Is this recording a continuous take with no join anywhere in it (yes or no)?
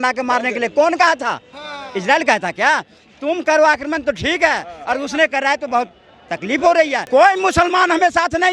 no